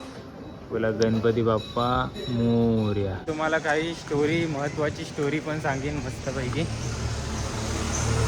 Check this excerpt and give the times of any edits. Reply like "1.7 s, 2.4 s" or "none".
3.2 s